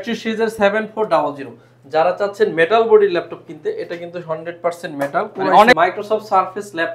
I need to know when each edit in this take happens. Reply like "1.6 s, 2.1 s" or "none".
5.8 s